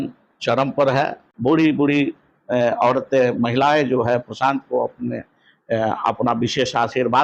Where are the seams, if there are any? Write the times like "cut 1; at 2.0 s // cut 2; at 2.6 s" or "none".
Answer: cut 1; at 1.2 s